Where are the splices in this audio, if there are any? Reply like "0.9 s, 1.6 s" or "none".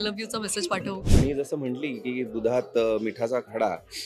1.0 s